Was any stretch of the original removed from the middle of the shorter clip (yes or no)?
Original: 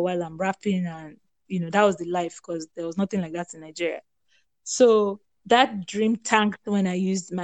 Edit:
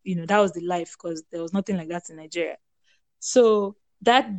no